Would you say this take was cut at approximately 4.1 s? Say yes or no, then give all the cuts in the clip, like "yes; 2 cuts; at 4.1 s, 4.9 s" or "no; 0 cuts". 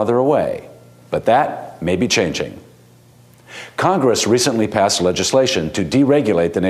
yes; 1 cut; at 4.1 s